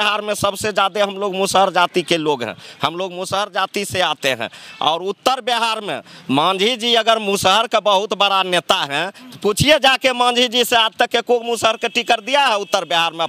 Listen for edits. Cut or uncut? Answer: uncut